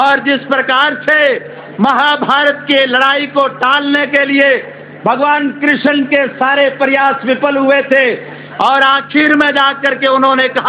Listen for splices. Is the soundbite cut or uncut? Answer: uncut